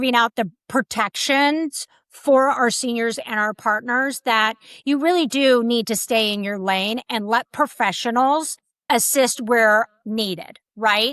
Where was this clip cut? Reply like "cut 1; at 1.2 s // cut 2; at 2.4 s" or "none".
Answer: none

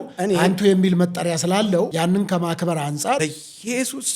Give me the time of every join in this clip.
cut 1; at 1.9 s // cut 2; at 3.2 s

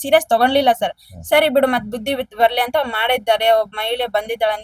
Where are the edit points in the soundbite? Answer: none

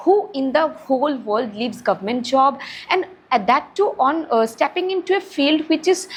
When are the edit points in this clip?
none

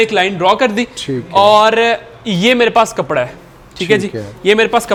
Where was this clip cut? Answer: none

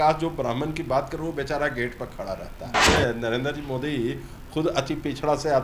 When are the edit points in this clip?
cut 1; at 2.9 s

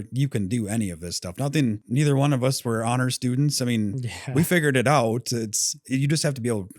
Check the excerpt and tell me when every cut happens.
none

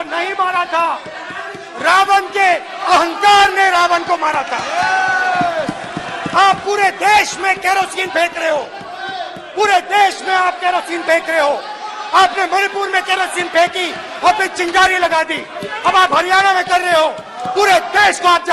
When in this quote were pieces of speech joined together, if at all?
none

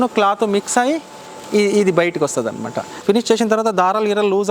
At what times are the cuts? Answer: cut 1; at 2.9 s

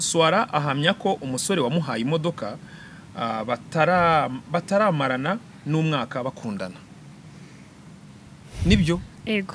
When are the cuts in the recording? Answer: none

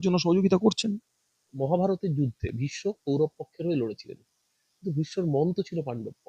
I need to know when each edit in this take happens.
cut 1; at 1.5 s

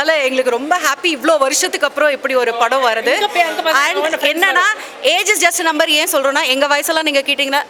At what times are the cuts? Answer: none

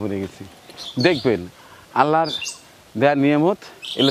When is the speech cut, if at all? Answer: none

